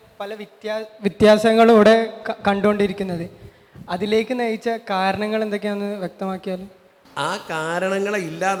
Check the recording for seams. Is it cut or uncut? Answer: uncut